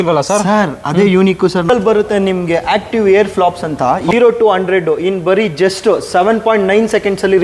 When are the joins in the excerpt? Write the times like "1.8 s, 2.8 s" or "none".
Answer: 1.7 s, 4.1 s